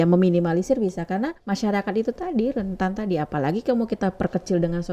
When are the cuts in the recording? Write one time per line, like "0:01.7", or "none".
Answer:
0:01.4